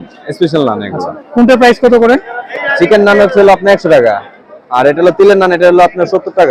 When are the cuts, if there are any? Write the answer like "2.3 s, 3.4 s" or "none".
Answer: none